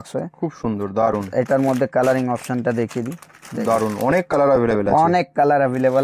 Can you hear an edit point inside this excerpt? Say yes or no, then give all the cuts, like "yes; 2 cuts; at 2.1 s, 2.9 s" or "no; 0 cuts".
no; 0 cuts